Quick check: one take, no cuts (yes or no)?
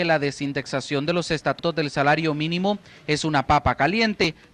yes